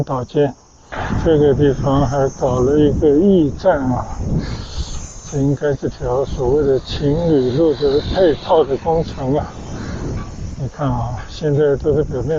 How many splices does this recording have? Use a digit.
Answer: 1